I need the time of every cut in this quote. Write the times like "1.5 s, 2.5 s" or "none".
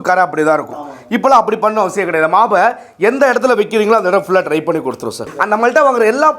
5.3 s